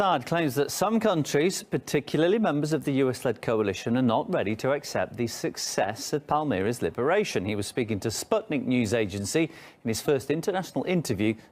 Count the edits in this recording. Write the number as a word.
one